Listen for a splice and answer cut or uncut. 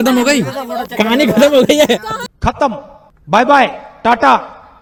uncut